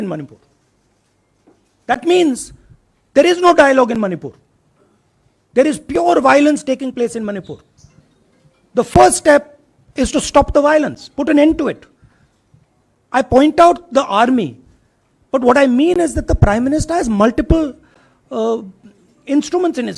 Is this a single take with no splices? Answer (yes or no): yes